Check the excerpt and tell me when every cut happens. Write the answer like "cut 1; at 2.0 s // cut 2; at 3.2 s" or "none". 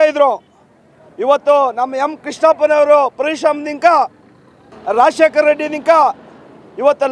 cut 1; at 4.7 s